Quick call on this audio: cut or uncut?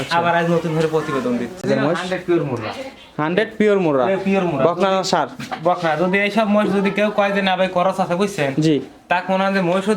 cut